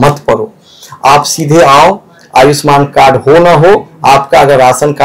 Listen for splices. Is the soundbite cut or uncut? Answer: uncut